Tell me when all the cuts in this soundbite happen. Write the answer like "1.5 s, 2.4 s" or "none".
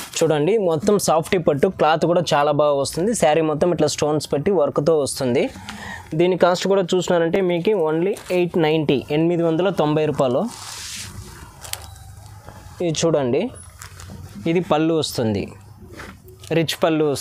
none